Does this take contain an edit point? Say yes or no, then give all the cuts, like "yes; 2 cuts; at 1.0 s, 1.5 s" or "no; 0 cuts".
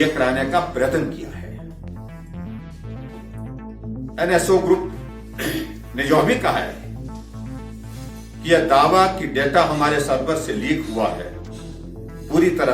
no; 0 cuts